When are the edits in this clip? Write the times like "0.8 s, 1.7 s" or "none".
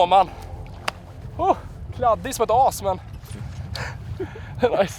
none

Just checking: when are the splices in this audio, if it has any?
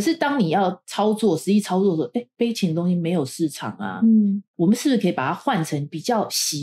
none

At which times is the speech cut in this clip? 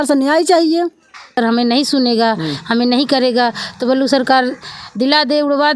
1.4 s

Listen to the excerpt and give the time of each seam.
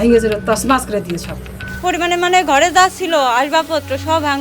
1.5 s

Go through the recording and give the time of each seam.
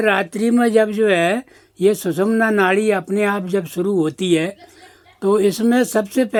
none

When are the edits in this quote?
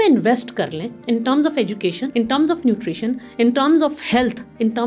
2.0 s

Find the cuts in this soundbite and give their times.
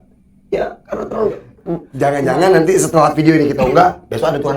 1.9 s

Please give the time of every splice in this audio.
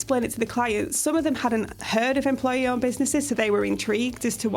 none

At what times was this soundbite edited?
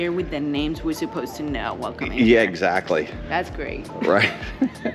3.2 s

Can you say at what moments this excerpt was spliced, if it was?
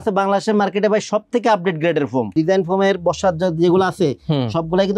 2.3 s

